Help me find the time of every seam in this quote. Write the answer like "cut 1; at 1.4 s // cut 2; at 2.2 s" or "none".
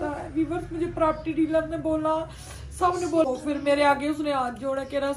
cut 1; at 3.2 s